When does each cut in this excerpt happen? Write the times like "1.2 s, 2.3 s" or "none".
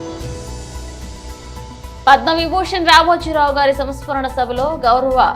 2.0 s